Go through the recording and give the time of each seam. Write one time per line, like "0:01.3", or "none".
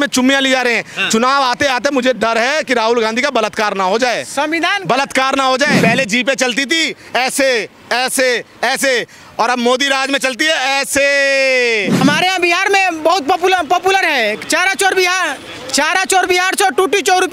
0:05.8
0:12.0